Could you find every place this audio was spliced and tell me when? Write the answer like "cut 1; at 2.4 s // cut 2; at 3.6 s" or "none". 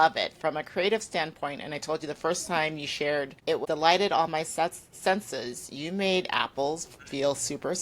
cut 1; at 3.5 s